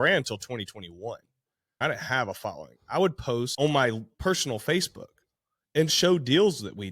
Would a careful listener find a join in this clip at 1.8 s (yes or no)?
yes